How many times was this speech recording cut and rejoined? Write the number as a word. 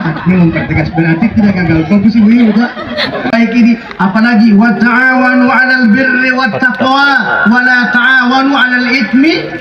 one